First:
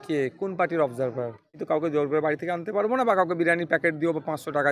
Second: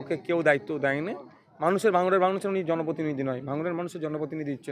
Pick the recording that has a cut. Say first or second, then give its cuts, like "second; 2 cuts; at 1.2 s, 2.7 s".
first; 1 cut; at 1.6 s